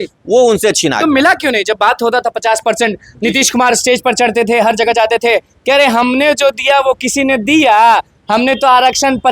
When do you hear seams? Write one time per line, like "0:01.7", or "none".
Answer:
none